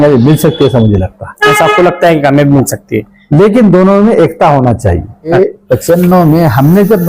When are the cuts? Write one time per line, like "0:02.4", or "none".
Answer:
0:05.3